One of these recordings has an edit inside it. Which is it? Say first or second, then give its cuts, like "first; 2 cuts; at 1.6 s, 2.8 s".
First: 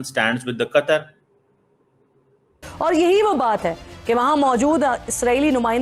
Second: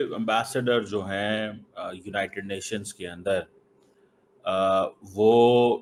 first; 1 cut; at 2.7 s